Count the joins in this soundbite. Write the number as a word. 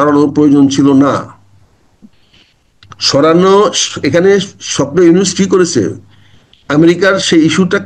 zero